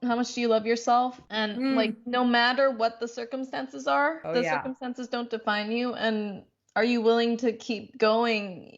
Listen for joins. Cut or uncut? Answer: cut